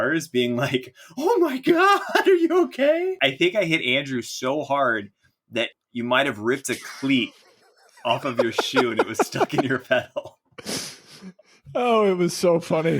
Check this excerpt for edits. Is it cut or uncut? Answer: cut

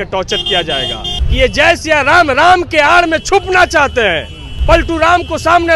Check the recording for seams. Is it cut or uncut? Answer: cut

